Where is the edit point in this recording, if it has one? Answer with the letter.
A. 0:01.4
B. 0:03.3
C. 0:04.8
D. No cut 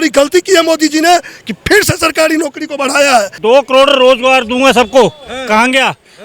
B